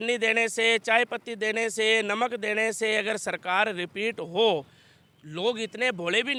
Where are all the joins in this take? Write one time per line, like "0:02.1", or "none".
none